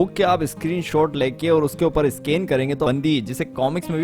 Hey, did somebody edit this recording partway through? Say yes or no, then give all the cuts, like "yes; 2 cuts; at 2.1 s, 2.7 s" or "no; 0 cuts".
yes; 1 cut; at 2.9 s